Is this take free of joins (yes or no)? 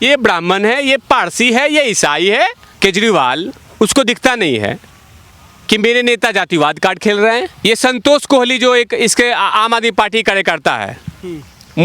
no